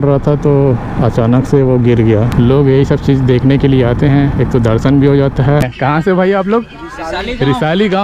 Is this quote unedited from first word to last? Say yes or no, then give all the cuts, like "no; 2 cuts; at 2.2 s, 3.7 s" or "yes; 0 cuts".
no; 2 cuts; at 2.3 s, 5.6 s